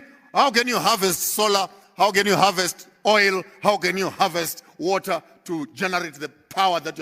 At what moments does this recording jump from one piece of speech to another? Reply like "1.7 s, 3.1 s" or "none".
none